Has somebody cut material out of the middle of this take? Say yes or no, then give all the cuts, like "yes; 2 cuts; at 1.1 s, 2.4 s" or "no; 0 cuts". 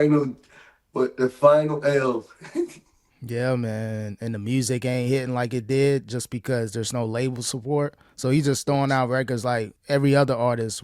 yes; 1 cut; at 9.7 s